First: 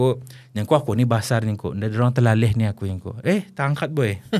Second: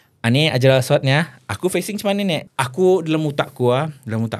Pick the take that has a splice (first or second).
second